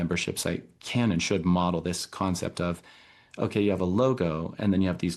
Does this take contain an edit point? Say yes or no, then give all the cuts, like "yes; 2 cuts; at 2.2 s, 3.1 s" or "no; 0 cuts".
no; 0 cuts